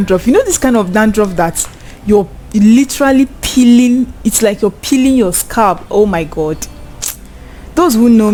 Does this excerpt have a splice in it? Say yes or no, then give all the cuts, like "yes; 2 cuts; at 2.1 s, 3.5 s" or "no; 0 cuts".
no; 0 cuts